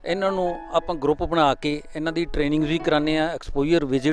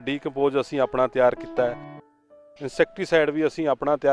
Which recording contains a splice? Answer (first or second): second